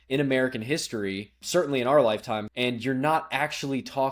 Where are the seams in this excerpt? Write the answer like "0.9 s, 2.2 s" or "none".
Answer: 1.4 s, 2.5 s